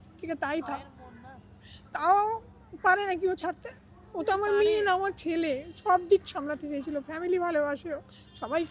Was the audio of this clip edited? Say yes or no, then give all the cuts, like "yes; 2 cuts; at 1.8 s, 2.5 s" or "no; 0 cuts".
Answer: no; 0 cuts